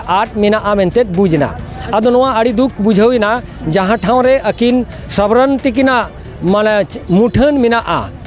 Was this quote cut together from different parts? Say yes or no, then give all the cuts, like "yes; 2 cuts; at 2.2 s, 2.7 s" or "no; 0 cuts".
no; 0 cuts